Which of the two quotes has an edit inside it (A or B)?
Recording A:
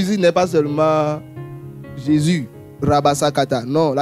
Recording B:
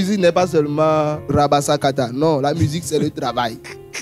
B